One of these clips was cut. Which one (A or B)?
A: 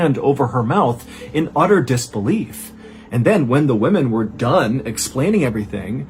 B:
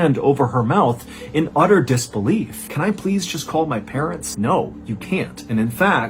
B